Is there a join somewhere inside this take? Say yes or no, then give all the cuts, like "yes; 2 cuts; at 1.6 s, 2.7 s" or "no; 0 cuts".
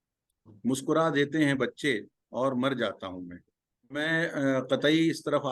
yes; 1 cut; at 3.9 s